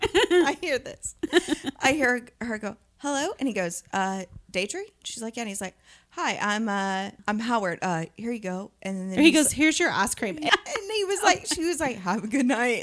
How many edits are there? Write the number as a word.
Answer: two